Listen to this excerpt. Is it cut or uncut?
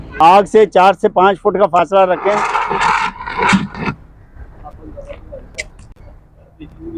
uncut